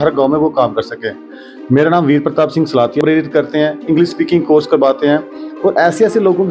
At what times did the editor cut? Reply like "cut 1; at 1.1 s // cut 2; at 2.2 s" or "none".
cut 1; at 3.0 s